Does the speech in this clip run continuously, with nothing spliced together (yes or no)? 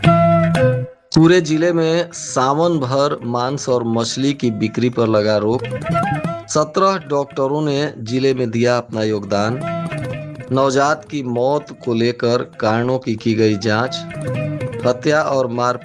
no